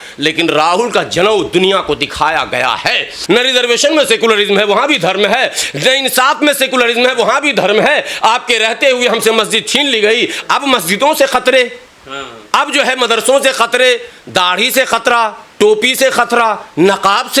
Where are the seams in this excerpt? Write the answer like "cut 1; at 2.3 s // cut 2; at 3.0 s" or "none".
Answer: cut 1; at 3.2 s // cut 2; at 10.4 s